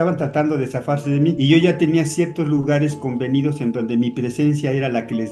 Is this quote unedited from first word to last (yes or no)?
yes